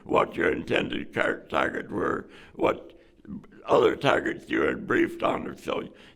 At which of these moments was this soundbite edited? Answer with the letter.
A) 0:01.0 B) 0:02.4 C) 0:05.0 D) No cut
D